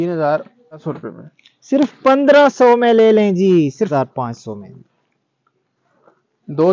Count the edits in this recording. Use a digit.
2